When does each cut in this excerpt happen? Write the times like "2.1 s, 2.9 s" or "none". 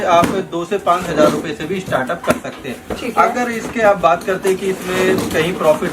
none